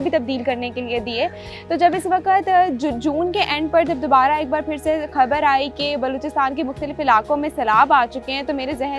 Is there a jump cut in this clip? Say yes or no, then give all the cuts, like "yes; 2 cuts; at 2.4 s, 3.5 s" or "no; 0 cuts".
yes; 1 cut; at 1.5 s